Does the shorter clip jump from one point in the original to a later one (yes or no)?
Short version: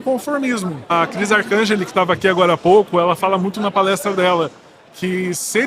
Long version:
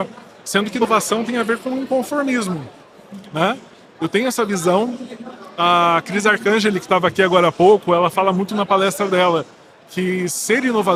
yes